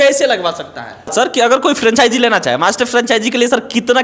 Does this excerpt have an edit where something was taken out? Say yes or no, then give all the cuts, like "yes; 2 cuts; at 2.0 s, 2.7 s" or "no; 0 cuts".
yes; 1 cut; at 1.3 s